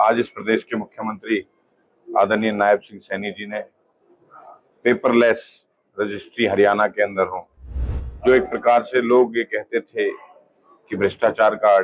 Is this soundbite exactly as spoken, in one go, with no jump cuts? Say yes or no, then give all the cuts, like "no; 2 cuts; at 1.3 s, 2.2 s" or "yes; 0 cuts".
yes; 0 cuts